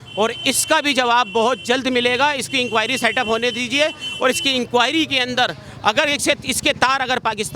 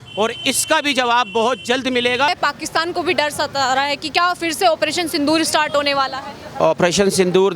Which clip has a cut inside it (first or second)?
second